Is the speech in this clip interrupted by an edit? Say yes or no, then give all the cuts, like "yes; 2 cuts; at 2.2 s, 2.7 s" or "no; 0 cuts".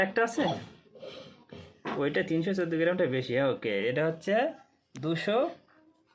no; 0 cuts